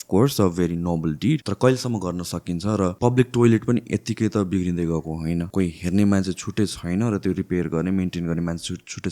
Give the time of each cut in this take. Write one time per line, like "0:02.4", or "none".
0:01.5
0:03.0
0:05.5